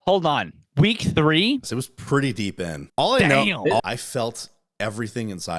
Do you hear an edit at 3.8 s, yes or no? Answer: yes